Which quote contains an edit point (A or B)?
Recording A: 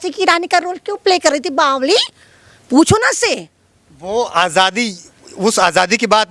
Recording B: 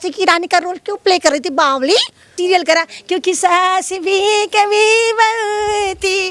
B